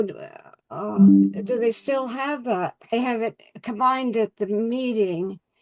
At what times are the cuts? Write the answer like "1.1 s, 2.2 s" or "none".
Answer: 2.9 s